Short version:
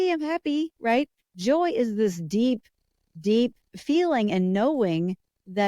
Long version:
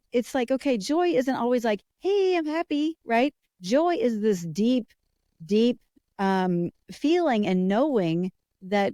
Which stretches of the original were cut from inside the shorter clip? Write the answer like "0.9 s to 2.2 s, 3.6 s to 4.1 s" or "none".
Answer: 5.9 s to 6.8 s